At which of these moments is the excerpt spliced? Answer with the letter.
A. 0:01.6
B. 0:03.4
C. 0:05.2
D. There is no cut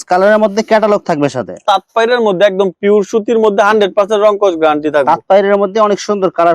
A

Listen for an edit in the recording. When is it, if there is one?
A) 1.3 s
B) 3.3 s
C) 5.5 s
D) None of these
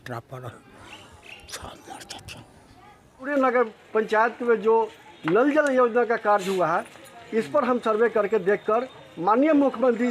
B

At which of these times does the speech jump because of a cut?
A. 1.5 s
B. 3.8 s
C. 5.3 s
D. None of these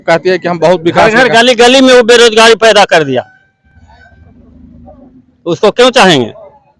D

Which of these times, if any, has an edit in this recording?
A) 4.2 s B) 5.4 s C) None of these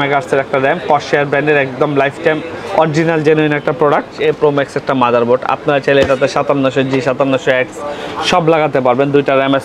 A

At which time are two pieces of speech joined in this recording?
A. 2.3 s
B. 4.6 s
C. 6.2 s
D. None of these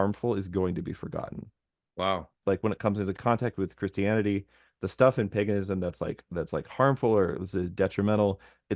A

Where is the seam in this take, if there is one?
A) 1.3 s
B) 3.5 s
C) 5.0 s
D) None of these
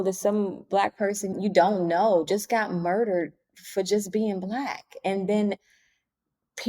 A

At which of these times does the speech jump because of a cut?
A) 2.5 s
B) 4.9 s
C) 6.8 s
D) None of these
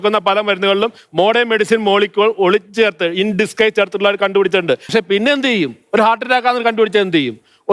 B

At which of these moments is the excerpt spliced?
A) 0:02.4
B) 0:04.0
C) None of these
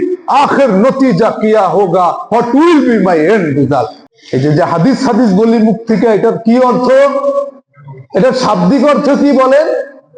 B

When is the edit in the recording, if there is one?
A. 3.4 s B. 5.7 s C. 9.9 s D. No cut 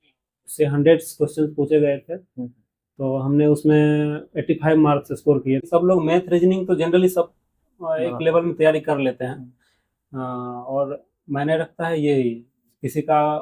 B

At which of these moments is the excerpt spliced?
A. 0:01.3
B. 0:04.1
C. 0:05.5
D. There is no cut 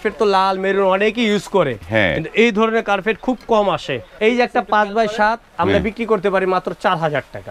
B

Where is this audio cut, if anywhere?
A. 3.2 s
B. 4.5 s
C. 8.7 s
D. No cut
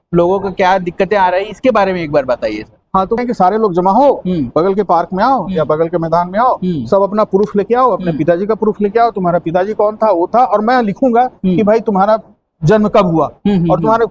A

